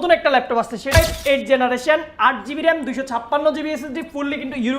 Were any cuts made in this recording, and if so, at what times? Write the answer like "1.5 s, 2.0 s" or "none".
0.9 s